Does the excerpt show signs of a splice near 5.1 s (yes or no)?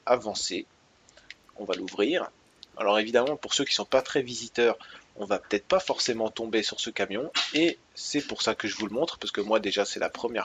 yes